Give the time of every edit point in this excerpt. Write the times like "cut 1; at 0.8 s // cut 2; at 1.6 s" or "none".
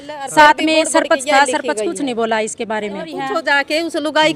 cut 1; at 3.2 s